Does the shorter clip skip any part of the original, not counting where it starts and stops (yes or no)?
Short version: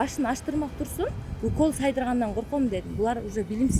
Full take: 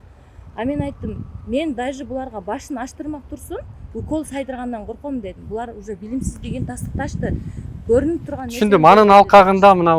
no